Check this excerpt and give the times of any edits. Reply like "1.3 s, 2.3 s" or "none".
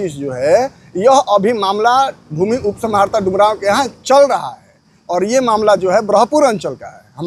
none